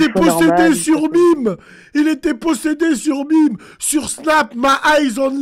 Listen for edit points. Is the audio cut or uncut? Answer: uncut